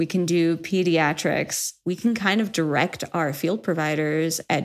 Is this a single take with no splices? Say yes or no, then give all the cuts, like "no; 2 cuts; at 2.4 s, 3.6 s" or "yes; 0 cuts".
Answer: no; 1 cut; at 1.7 s